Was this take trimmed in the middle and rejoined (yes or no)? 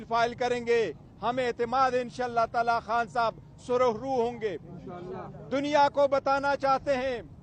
no